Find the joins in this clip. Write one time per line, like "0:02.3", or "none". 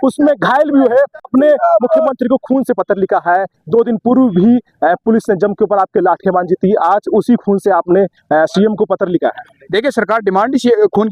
0:01.3